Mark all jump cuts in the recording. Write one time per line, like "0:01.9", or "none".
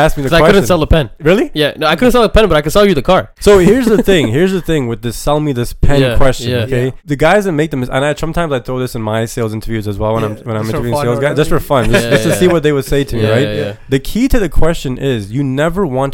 0:01.2
0:03.3
0:07.0